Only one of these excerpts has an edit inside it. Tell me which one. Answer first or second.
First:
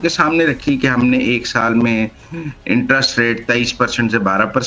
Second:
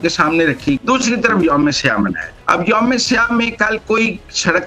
second